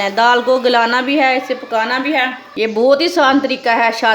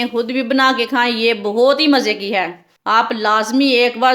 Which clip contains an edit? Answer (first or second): first